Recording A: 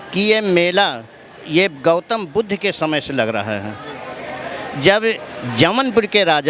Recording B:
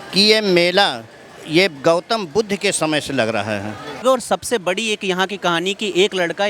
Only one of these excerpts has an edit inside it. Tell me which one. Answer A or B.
B